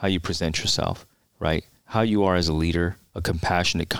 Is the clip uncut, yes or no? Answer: no